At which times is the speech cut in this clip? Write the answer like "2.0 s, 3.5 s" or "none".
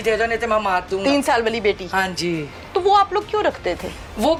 none